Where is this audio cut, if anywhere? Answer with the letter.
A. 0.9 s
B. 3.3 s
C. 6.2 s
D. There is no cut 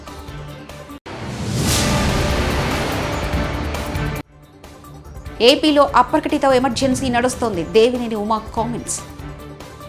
A